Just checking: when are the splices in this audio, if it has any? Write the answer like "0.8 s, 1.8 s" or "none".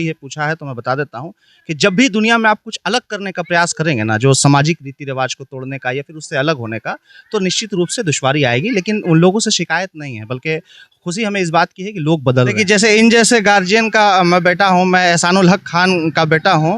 12.5 s

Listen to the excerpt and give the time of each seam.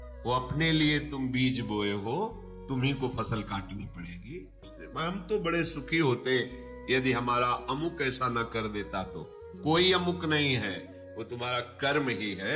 4.8 s

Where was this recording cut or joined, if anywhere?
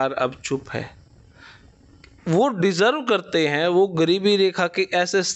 none

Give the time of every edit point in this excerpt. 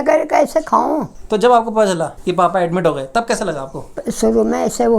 1.1 s, 3.9 s

